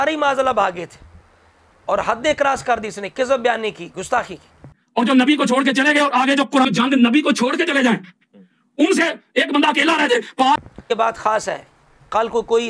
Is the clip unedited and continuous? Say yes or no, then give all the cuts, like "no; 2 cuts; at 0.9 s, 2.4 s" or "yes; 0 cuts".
no; 3 cuts; at 1.3 s, 4.8 s, 10.6 s